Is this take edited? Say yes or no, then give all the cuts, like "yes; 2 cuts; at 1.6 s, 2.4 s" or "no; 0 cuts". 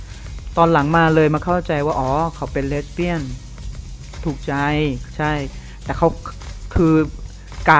no; 0 cuts